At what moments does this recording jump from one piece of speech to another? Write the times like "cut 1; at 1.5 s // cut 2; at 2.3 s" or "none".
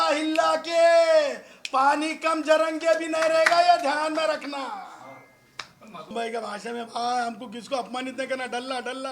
cut 1; at 6.1 s